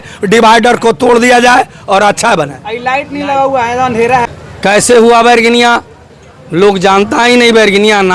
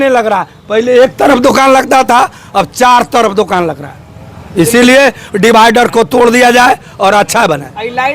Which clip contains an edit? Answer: first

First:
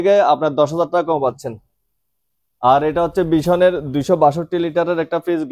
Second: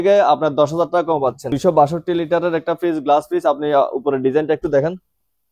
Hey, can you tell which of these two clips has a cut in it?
second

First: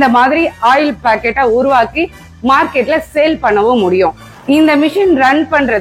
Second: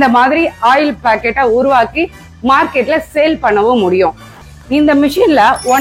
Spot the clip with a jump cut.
second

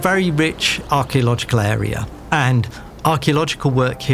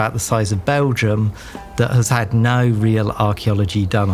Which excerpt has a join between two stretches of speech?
first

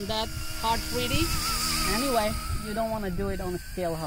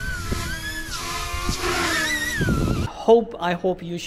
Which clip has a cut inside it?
second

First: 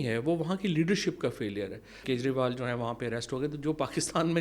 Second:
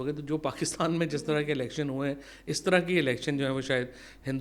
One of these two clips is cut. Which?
first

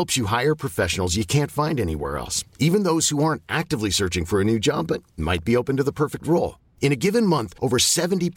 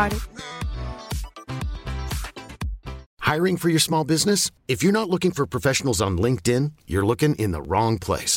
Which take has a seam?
second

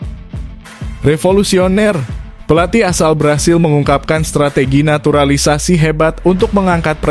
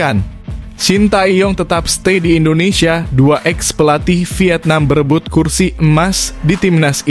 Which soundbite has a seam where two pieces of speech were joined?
first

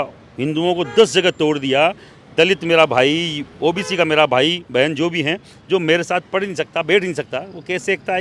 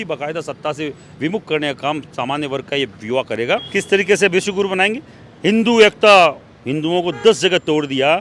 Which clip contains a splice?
second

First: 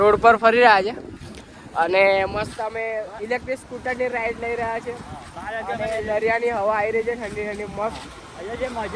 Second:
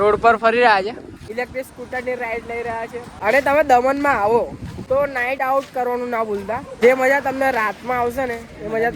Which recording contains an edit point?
second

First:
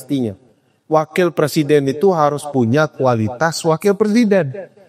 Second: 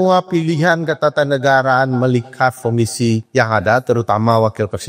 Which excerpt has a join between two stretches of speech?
second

